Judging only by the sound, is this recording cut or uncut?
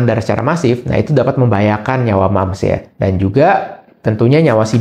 uncut